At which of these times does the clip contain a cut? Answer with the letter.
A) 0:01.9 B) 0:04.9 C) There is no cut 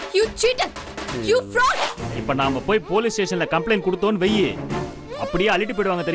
A